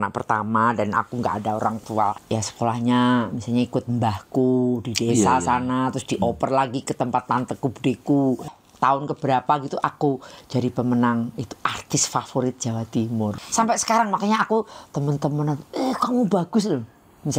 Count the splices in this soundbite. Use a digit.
3